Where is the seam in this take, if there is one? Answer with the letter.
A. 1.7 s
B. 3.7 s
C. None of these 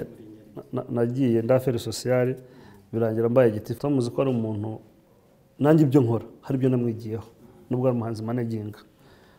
B